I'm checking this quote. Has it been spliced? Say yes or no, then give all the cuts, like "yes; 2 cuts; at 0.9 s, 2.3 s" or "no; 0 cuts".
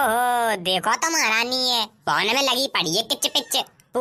no; 0 cuts